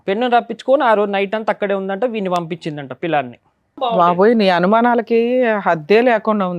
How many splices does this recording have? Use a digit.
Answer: 1